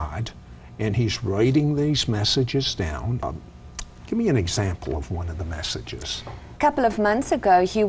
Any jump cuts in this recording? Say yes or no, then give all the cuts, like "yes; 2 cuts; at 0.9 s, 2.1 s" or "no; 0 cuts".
yes; 2 cuts; at 3.2 s, 6.4 s